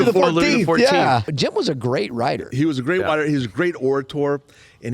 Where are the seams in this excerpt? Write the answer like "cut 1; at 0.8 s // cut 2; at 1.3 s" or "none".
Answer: cut 1; at 1.3 s